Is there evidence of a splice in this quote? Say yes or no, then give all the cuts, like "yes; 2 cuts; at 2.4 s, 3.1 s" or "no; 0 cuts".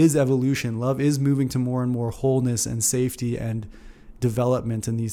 no; 0 cuts